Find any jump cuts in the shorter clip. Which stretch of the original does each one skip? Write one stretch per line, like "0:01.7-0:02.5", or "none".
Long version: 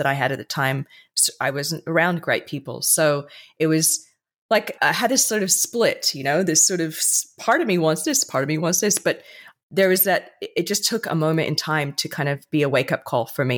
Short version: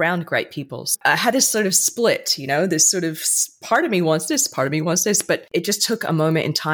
0:02.9-0:04.7
0:09.2-0:10.5